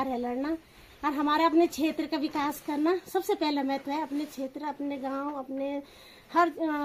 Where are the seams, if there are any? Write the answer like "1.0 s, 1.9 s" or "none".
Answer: none